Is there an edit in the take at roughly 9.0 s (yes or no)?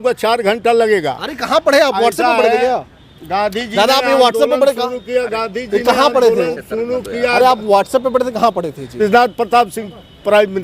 yes